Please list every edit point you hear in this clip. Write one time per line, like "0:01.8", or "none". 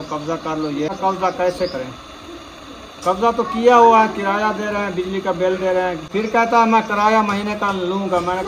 0:00.9
0:06.1